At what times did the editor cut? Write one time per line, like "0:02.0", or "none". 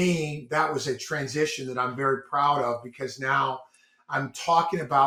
none